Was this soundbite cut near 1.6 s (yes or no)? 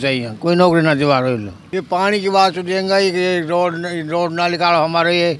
yes